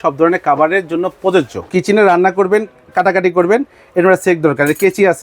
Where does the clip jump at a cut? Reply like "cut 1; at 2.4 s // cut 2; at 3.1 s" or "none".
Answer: cut 1; at 1.6 s

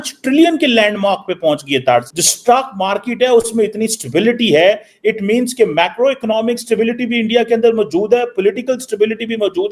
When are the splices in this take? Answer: cut 1; at 2.1 s

